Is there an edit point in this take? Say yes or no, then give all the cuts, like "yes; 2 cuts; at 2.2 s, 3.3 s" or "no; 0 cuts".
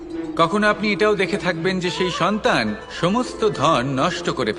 no; 0 cuts